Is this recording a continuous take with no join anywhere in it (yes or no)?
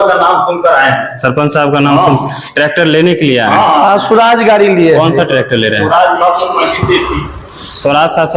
yes